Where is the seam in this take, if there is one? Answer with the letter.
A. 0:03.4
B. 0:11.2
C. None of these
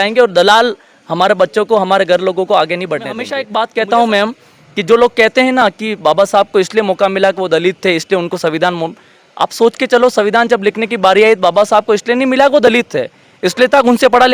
A